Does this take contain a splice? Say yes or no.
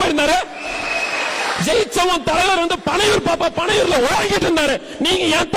no